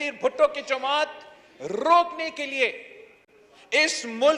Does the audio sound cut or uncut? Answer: uncut